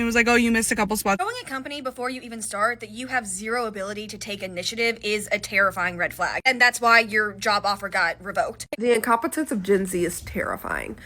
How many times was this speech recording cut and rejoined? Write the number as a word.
two